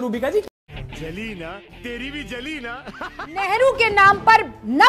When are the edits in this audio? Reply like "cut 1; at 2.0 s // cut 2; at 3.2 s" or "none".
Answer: cut 1; at 3.5 s